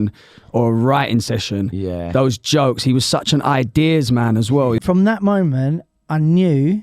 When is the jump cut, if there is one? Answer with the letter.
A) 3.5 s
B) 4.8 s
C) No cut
B